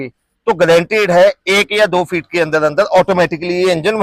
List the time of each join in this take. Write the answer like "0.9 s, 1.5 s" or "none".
none